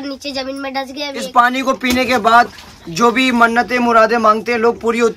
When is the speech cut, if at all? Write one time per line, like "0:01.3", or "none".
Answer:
0:01.2